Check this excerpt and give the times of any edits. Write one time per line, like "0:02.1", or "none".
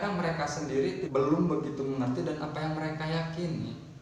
0:01.0